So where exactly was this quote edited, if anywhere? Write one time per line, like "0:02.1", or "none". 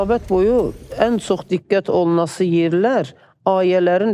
none

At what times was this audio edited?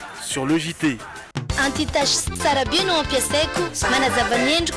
0:01.3

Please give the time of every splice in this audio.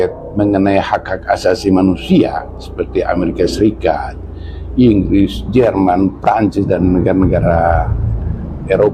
none

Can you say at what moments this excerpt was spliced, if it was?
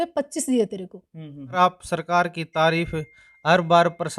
0:01.6

